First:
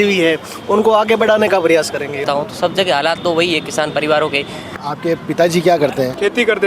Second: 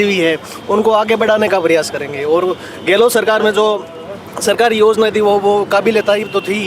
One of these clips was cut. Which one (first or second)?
first